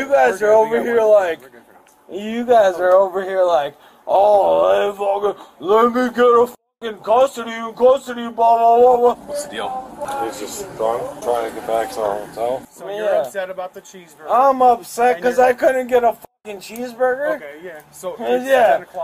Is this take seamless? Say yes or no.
yes